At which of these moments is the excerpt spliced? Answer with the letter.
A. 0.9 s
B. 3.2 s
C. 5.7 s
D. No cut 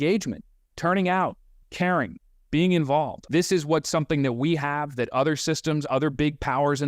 B